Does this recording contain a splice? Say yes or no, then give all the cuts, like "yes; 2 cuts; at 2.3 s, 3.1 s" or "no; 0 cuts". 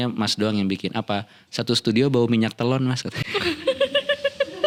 no; 0 cuts